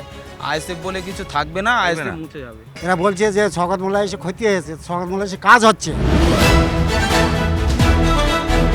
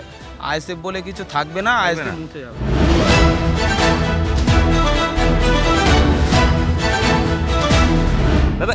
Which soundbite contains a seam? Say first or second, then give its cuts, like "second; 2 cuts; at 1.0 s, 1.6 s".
first; 2 cuts; at 2.5 s, 5.9 s